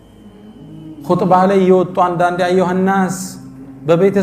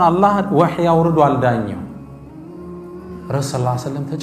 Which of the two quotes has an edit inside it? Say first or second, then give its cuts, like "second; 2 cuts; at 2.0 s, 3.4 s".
second; 2 cuts; at 1.9 s, 3.3 s